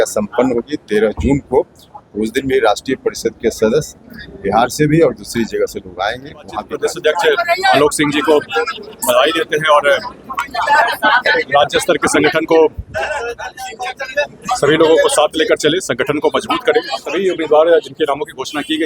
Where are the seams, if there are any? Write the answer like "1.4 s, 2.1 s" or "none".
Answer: 6.7 s, 17.2 s